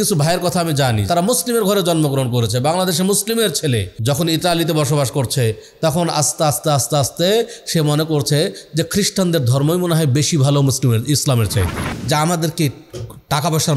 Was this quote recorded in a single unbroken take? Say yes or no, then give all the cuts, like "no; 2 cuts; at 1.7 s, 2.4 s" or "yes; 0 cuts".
no; 3 cuts; at 1.0 s, 3.9 s, 11.9 s